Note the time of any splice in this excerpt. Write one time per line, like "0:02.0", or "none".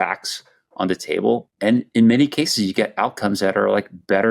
0:01.5